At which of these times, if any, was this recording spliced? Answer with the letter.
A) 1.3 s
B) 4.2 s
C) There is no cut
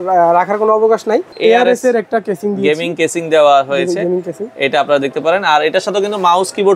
A